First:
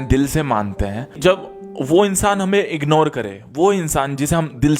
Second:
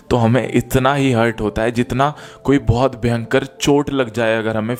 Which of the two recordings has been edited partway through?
first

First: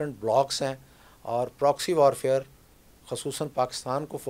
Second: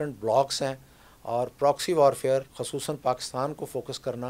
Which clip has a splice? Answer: second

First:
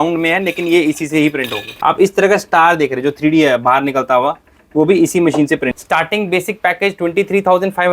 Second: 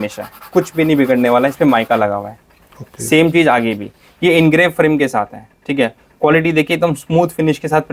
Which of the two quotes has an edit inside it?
first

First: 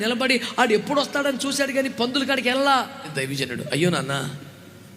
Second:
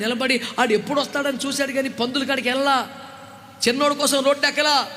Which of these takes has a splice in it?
first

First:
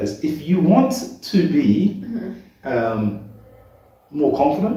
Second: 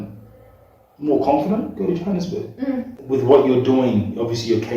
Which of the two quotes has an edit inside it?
second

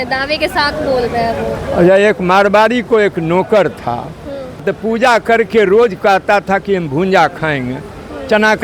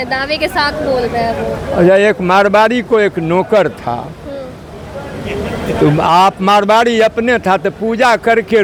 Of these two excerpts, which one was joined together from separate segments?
first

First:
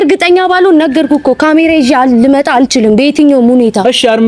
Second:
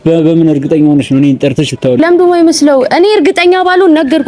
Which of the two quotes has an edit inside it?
second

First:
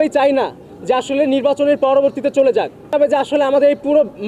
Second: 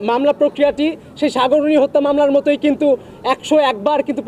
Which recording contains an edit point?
first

